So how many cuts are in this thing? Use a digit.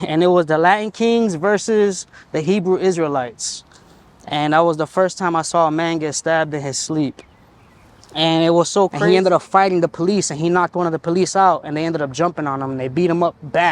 1